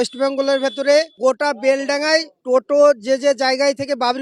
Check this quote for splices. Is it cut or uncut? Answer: cut